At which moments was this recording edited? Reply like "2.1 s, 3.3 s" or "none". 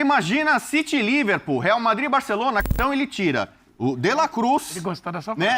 2.6 s